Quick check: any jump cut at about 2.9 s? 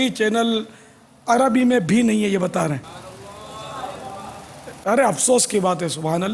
yes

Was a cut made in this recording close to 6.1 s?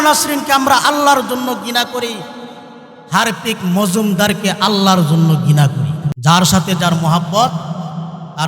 yes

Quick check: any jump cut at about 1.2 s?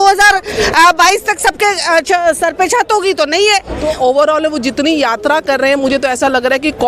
no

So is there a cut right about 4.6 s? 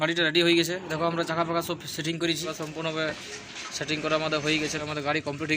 yes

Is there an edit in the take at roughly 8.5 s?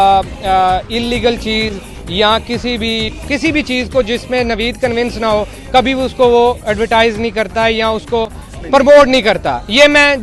yes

